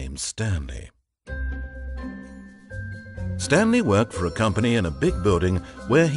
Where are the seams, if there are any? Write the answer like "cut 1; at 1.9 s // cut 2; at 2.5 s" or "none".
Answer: cut 1; at 3.5 s